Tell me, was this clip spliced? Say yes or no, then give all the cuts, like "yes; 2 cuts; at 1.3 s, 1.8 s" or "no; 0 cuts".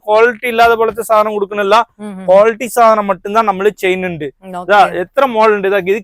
no; 0 cuts